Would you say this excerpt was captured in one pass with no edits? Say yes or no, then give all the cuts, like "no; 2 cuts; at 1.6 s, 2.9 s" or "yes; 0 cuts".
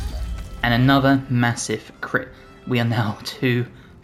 yes; 0 cuts